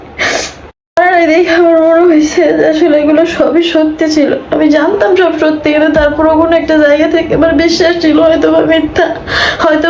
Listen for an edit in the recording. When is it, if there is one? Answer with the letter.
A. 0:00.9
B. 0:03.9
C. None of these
A